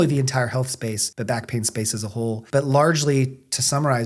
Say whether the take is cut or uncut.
cut